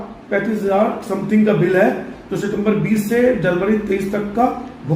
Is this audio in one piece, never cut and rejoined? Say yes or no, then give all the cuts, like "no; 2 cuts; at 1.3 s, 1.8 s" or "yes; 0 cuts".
yes; 0 cuts